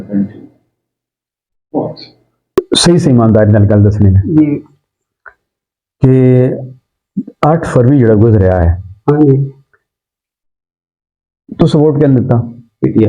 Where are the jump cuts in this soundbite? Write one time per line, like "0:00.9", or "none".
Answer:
0:02.4